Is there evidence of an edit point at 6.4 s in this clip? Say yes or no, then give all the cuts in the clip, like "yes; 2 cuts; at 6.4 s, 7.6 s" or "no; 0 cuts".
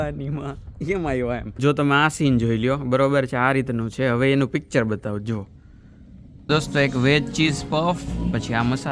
yes; 2 cuts; at 1.6 s, 6.4 s